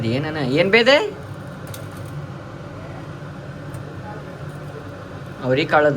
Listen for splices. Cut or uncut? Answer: uncut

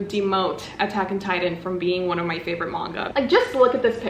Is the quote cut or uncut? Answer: cut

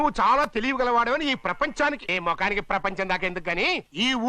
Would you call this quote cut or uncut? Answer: cut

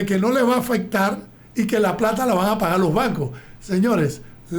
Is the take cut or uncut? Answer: uncut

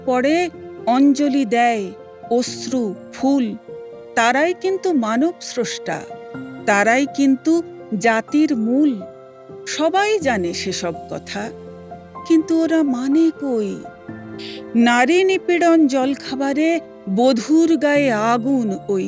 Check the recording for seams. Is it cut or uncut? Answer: uncut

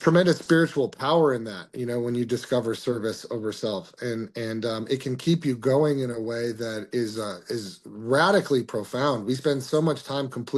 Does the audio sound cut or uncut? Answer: uncut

